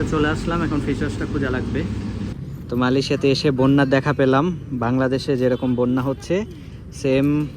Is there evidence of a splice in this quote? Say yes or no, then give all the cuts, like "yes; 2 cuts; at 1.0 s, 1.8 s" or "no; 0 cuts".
yes; 1 cut; at 2.3 s